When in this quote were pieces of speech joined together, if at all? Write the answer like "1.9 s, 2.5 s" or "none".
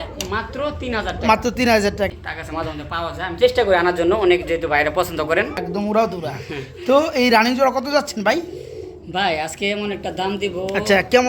2.1 s, 5.6 s